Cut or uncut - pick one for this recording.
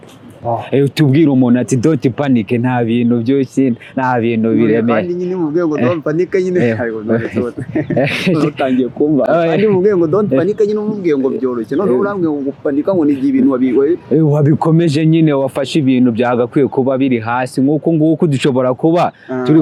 uncut